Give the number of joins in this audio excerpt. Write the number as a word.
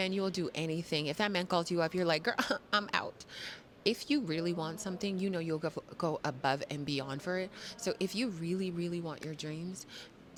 zero